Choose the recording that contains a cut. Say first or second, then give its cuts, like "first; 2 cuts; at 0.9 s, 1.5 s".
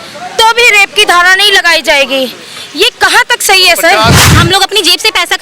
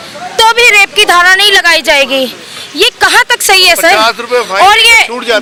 first; 1 cut; at 4.2 s